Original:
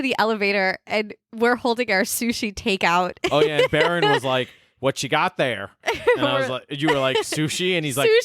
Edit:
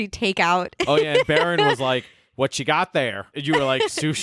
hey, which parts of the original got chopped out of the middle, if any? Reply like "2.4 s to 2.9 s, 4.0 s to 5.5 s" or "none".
5.7 s to 6.6 s